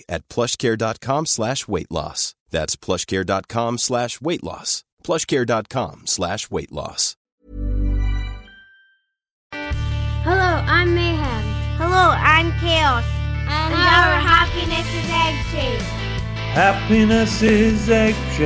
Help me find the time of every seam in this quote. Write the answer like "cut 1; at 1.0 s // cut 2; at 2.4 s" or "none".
cut 1; at 7.4 s // cut 2; at 9.4 s